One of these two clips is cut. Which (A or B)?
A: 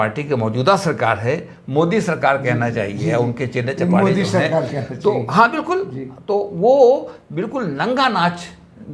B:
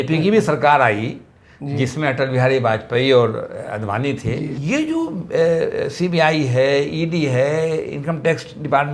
B